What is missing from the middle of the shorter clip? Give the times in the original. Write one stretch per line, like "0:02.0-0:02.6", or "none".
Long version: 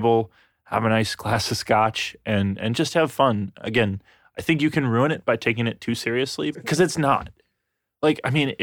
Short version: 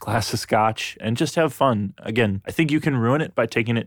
0:02.2-0:02.6
0:04.0-0:04.3